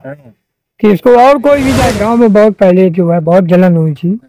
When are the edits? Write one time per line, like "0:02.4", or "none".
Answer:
0:01.9

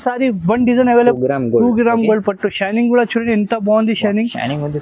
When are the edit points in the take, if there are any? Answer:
0:01.1

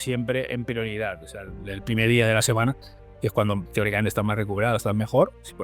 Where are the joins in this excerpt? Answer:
none

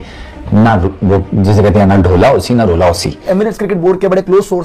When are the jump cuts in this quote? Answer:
0:03.5

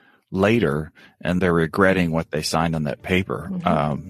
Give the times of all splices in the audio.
0:01.4

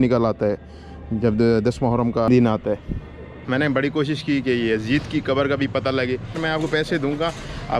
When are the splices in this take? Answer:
0:03.4
0:06.4

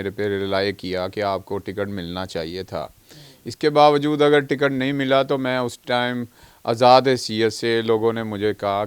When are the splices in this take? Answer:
none

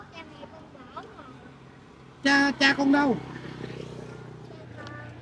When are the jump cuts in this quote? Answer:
none

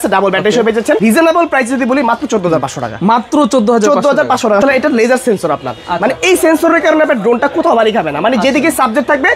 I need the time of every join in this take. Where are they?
0:01.0
0:04.6

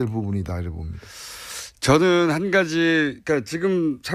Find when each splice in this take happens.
none

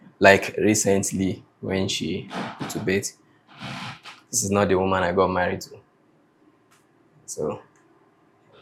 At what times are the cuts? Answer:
none

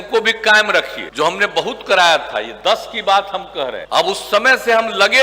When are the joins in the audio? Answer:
0:01.0
0:03.8

